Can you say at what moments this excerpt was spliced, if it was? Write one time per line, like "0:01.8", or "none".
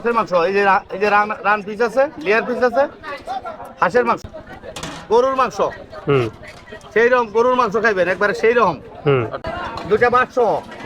0:04.2
0:09.4